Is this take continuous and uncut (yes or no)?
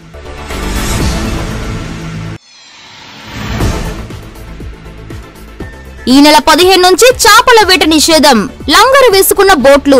no